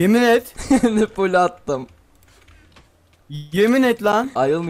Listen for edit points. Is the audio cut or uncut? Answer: uncut